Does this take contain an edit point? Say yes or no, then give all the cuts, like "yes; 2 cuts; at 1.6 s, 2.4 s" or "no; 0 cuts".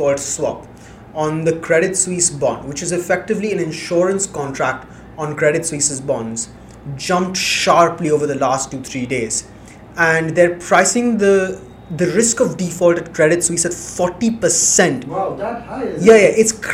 no; 0 cuts